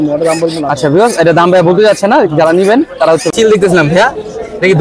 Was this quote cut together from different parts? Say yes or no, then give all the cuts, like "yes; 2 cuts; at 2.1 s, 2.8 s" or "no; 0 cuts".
yes; 1 cut; at 3.3 s